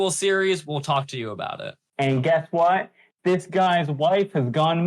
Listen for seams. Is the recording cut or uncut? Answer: cut